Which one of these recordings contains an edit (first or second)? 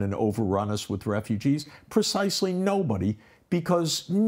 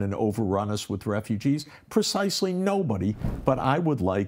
second